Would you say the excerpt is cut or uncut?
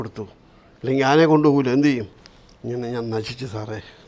uncut